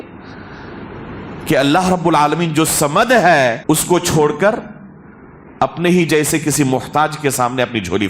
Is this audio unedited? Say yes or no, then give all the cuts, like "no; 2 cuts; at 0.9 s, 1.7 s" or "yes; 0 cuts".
no; 1 cut; at 3.6 s